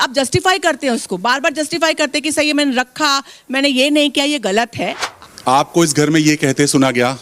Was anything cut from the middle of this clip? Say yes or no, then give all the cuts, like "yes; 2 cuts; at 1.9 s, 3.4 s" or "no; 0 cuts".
yes; 1 cut; at 5.3 s